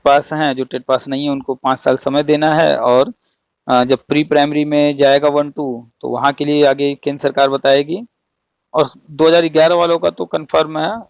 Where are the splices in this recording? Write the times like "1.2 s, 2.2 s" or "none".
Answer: none